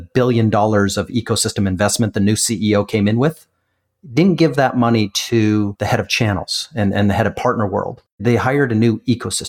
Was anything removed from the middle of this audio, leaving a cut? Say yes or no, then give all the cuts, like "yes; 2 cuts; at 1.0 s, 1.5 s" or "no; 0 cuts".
no; 0 cuts